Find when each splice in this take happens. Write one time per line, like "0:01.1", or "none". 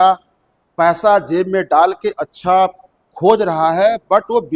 none